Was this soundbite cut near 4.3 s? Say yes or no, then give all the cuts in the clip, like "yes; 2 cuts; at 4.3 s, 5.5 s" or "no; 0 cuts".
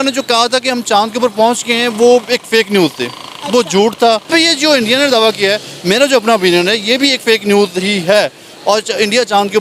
yes; 1 cut; at 4.3 s